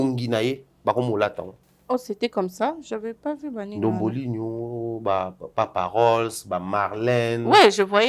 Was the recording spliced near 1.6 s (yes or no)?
no